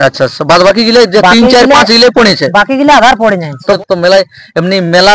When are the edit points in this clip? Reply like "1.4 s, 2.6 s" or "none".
3.8 s